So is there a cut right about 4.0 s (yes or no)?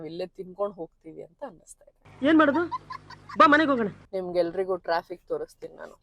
no